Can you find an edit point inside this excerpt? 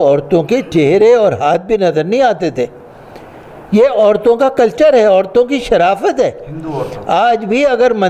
no; 0 cuts

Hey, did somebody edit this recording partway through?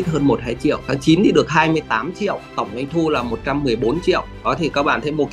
yes; 2 cuts; at 0.8 s, 2.5 s

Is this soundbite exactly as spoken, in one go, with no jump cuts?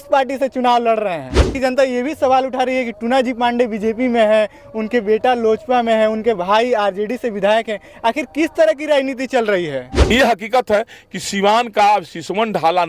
no; 2 cuts; at 1.5 s, 10.1 s

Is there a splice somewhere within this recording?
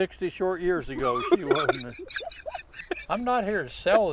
yes; 1 cut; at 2.8 s

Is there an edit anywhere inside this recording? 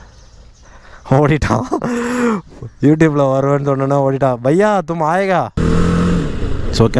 yes; 1 cut; at 5.5 s

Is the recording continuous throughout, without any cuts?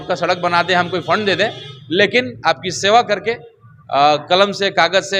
yes; 0 cuts

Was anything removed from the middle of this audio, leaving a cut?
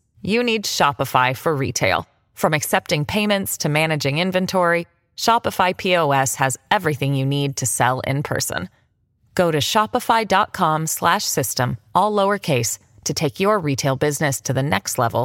no; 0 cuts

